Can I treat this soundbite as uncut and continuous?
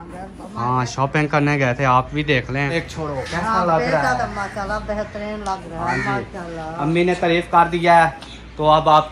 no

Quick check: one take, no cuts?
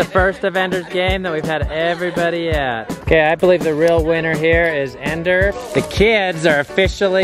no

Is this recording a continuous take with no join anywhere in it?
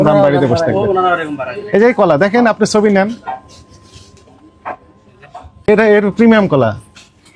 no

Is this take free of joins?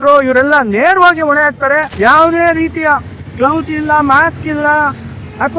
no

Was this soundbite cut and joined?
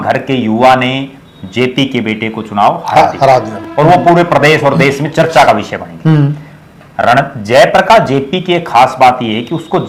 no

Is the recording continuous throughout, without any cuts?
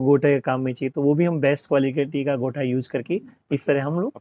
yes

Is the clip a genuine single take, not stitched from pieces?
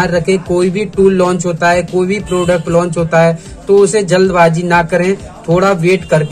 yes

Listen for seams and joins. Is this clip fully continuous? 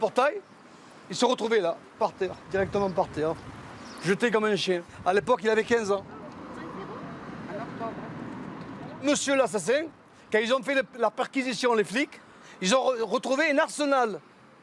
yes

